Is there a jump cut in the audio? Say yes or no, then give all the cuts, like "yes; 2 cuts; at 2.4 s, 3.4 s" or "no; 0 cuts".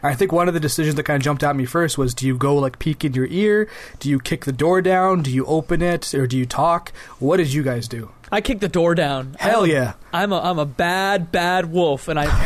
no; 0 cuts